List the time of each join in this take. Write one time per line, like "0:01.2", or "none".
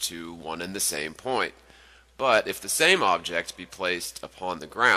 0:01.1